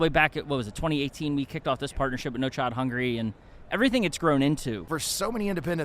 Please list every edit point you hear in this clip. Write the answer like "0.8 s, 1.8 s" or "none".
4.9 s